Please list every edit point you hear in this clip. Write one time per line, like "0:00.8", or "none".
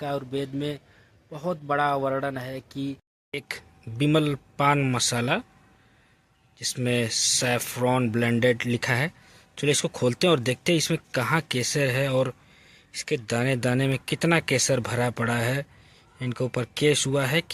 0:03.1